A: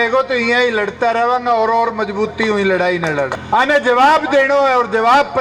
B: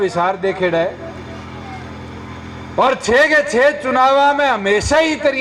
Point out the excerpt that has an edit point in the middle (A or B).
A